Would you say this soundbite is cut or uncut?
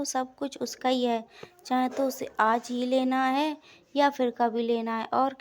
uncut